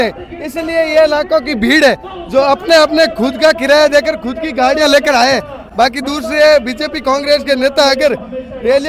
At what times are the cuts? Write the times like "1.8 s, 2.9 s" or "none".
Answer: none